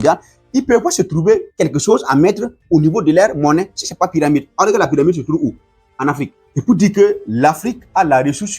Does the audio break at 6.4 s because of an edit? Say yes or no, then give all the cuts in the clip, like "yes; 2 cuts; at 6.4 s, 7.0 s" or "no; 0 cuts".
yes; 2 cuts; at 1.5 s, 6.4 s